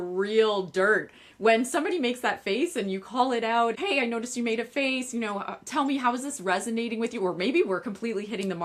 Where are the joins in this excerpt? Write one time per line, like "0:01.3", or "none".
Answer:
none

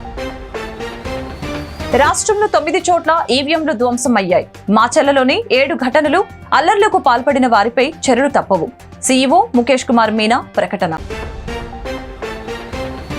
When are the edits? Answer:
0:01.9

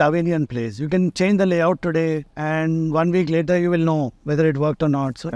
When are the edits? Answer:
0:02.3

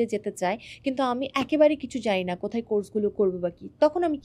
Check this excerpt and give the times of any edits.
none

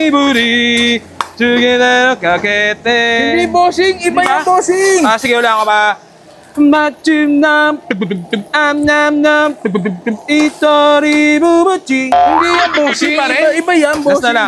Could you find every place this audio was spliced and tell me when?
none

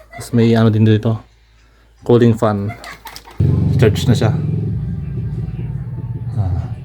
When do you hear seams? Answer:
0:03.3

